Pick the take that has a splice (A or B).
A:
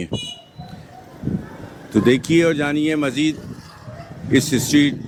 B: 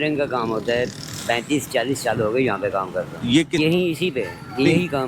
B